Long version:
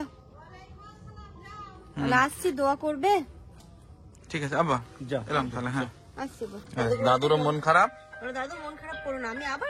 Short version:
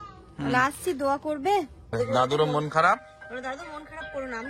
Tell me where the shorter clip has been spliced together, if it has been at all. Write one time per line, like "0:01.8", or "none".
0:01.9